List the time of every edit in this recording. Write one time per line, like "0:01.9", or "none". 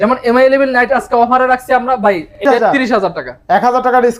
0:02.4